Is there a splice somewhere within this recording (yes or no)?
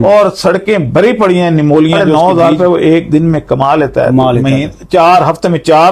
yes